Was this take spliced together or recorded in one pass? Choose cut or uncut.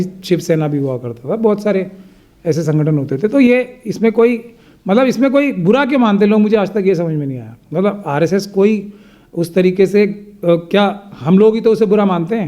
uncut